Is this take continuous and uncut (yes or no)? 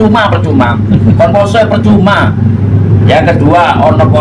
yes